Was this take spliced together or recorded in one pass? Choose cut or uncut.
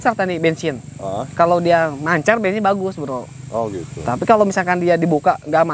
uncut